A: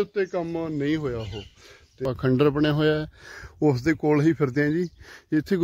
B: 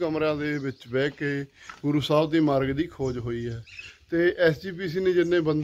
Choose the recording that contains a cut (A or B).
A